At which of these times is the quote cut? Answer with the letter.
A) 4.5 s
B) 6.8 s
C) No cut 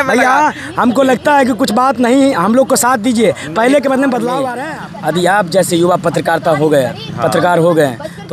A